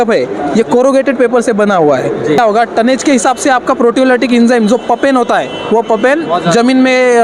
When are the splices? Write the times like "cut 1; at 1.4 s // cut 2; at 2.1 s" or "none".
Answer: cut 1; at 2.4 s